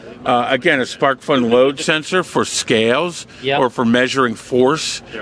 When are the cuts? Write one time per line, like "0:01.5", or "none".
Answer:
none